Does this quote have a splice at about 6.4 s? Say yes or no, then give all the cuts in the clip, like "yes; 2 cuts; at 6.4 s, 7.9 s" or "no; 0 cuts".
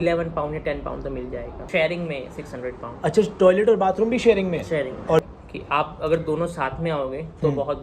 no; 2 cuts; at 1.7 s, 5.2 s